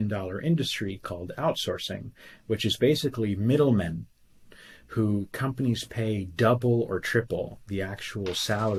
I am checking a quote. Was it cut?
no; 0 cuts

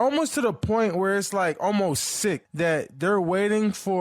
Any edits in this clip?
no; 0 cuts

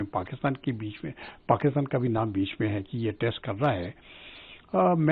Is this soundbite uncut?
yes; 0 cuts

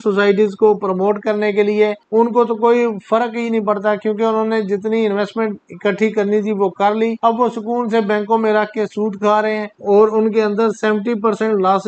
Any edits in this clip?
yes; 3 cuts; at 2.0 s, 7.2 s, 9.8 s

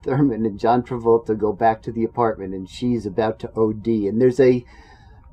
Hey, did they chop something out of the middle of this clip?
no; 0 cuts

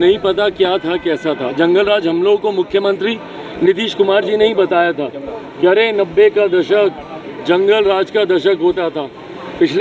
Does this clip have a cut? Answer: no; 0 cuts

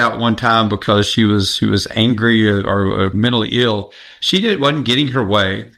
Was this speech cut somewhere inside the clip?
no; 0 cuts

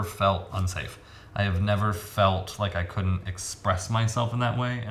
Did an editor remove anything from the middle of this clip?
no; 0 cuts

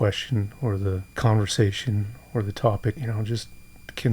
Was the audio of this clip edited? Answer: yes; 2 cuts; at 1.1 s, 3.0 s

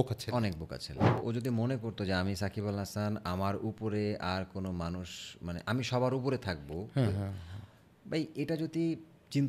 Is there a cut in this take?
yes; 1 cut; at 1.2 s

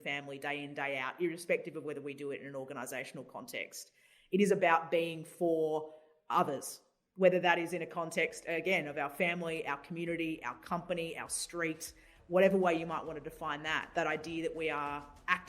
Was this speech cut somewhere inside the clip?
yes; 1 cut; at 13.9 s

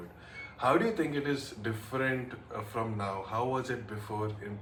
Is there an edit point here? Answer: no; 0 cuts

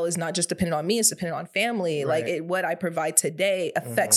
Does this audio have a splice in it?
no; 0 cuts

